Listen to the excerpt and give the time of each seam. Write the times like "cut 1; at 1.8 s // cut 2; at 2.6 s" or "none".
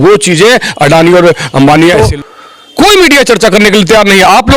cut 1; at 2.0 s